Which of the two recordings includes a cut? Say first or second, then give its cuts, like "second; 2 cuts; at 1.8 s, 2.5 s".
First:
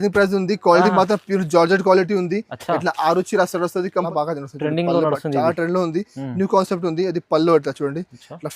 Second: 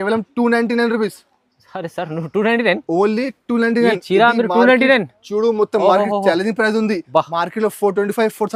first; 1 cut; at 4.1 s